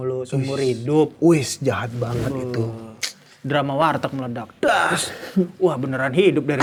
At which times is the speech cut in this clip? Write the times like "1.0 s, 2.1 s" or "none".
none